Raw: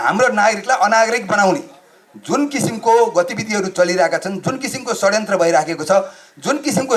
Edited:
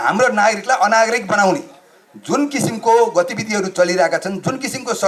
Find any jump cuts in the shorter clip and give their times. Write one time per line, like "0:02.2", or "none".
none